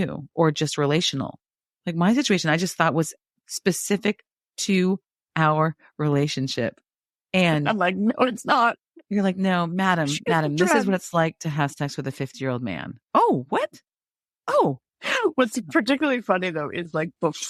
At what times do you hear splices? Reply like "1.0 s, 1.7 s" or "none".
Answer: none